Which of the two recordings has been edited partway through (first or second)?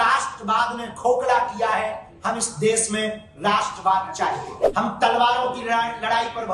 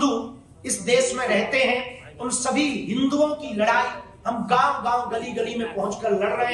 first